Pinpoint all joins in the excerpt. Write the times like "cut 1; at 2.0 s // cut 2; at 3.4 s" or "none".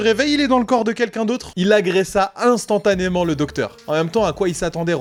none